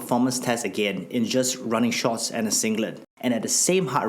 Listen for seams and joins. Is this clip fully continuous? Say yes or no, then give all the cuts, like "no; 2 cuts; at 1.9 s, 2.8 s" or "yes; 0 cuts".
no; 1 cut; at 3.0 s